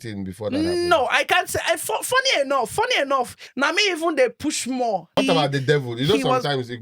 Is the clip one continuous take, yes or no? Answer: no